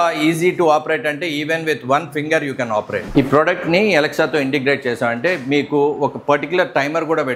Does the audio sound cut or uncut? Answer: cut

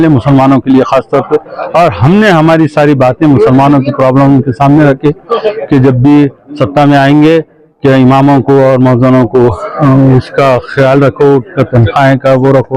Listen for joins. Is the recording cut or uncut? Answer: uncut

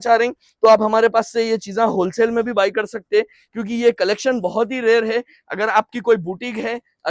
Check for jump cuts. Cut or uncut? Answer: uncut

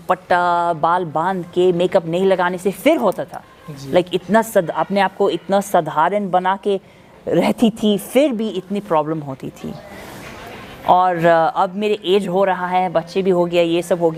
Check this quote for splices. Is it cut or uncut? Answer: uncut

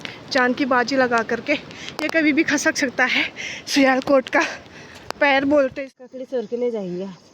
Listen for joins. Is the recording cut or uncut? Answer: cut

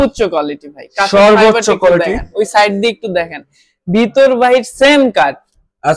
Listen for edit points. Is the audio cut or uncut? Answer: uncut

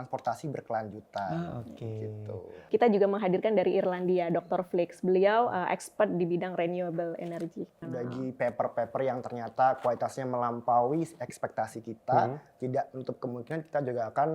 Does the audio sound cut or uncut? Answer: cut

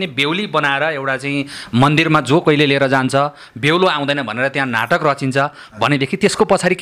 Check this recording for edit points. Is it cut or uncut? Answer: uncut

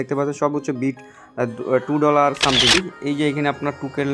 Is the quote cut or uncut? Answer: cut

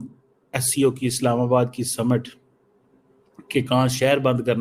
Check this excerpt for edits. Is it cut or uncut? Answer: uncut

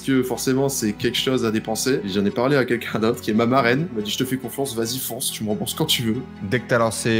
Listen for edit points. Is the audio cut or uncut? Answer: cut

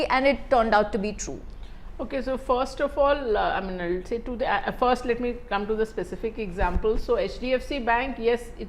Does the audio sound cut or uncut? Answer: uncut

